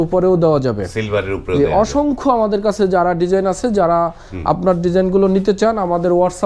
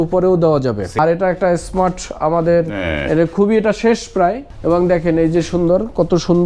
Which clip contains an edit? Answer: second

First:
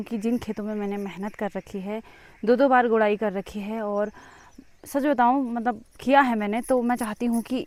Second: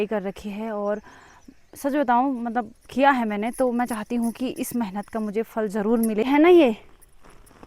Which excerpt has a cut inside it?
second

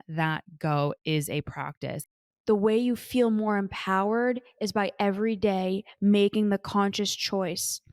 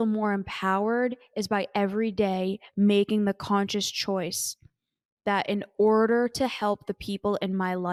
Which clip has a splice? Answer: first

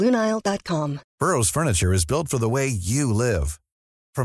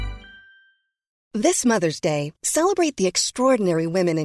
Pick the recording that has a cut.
second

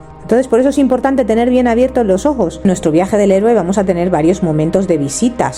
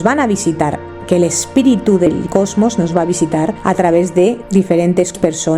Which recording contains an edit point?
first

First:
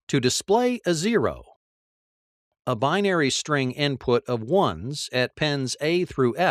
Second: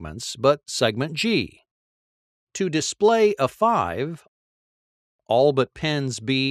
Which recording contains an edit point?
first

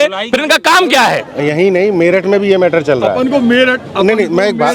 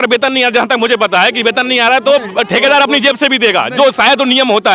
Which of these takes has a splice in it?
first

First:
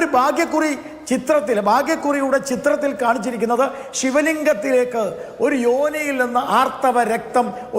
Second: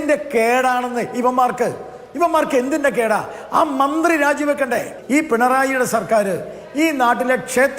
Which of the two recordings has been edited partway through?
second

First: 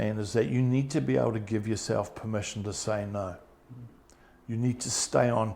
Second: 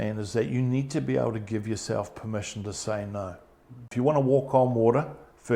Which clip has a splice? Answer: second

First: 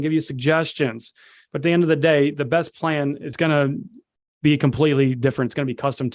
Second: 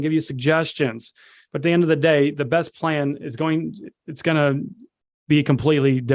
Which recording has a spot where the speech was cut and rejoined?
first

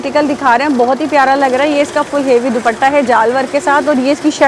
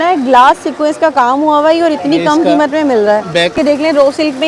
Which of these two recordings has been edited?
second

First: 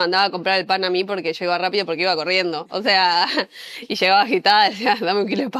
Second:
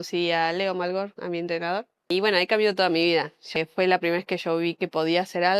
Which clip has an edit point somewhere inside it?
second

